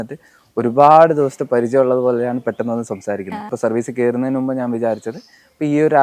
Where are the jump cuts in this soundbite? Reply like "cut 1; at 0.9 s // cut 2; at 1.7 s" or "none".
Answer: cut 1; at 3.5 s